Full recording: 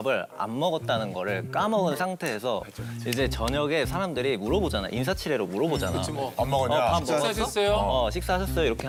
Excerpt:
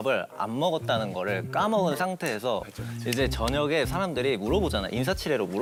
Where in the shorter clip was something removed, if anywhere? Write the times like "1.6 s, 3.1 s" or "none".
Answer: none